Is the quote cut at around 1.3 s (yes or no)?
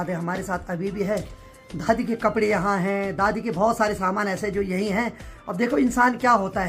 no